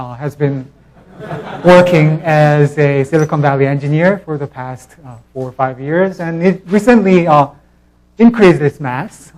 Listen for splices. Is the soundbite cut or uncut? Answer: cut